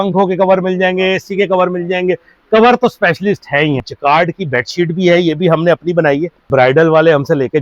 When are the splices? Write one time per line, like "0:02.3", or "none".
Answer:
0:03.8
0:06.5